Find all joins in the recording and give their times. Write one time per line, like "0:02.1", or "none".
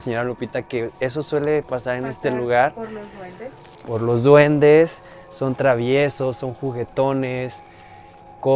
none